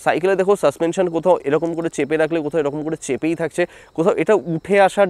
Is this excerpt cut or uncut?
uncut